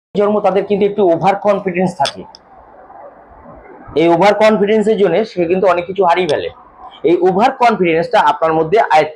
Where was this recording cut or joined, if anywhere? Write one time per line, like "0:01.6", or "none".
none